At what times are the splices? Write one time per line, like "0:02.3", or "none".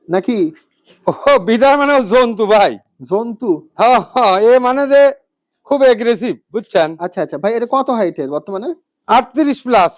none